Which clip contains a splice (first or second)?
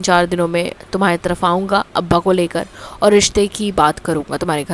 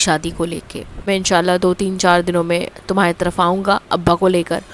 second